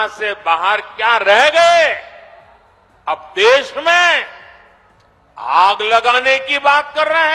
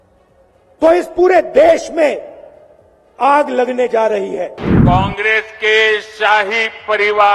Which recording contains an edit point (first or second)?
second